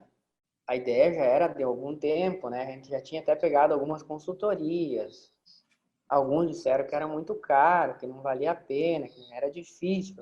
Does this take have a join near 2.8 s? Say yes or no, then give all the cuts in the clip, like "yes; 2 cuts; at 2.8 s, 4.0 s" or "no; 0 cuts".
no; 0 cuts